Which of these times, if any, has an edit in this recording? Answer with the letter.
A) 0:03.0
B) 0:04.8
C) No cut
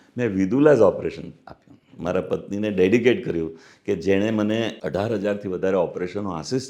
B